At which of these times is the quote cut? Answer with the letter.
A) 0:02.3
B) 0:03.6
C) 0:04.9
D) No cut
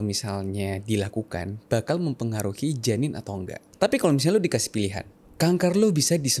B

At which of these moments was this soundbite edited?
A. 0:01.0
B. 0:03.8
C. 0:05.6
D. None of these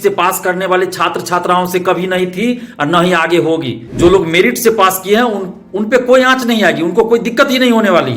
B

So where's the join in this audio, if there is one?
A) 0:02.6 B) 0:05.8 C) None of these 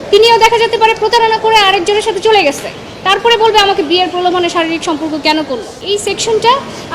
B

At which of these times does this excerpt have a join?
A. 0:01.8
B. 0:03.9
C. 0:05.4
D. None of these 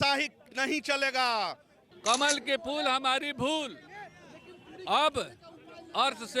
A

